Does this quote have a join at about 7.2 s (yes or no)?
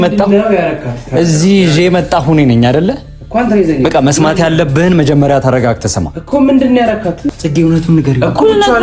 yes